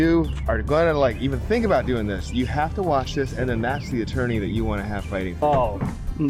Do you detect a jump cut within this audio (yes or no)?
no